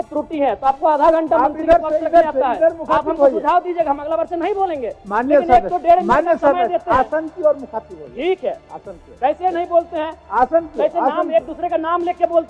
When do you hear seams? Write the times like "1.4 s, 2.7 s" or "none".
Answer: none